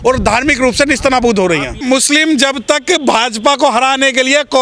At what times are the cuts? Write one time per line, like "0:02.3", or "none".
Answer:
0:01.8